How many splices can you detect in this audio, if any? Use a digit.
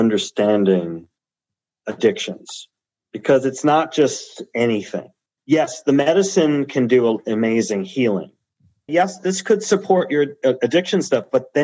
1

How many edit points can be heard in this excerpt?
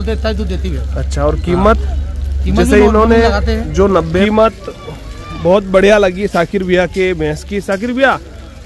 1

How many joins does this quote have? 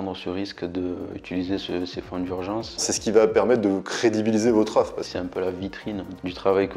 2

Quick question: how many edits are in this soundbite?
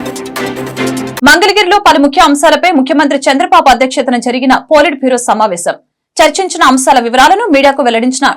1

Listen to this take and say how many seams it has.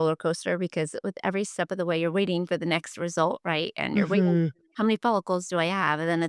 1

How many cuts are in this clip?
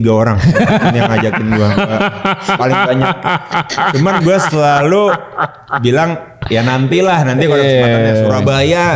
0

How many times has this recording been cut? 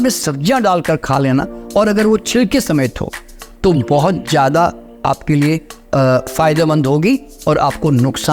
0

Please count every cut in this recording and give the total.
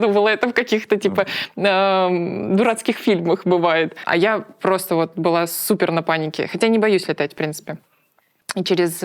0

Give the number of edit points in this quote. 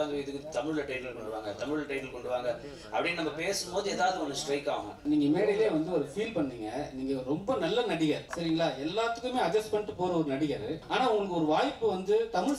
3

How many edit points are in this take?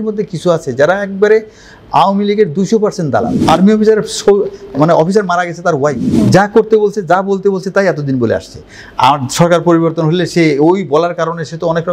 2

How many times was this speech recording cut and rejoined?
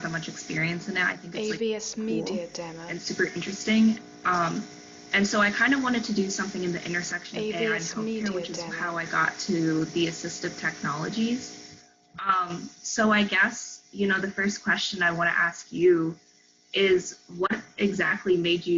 2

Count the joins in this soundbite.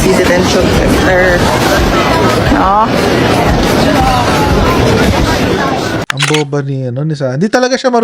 1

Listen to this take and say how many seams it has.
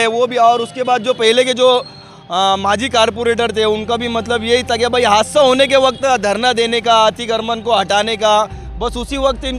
0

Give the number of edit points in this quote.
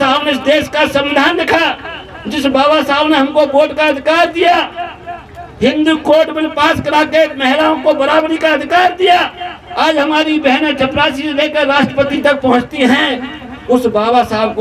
0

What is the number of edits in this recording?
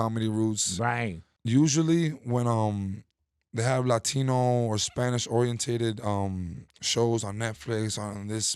1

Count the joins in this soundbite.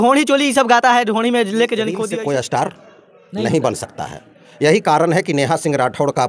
1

